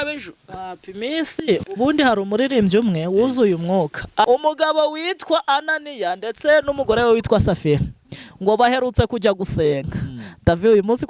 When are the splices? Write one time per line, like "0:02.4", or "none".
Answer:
0:04.3